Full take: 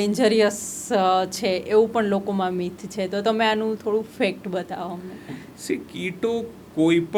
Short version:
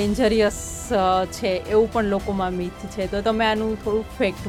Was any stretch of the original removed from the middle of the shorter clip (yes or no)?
no